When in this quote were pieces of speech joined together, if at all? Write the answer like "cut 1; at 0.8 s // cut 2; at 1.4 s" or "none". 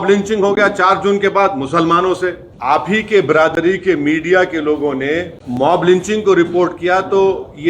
cut 1; at 2.5 s // cut 2; at 5.4 s